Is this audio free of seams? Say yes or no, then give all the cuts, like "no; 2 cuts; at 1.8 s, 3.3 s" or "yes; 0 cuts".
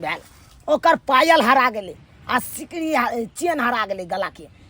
yes; 0 cuts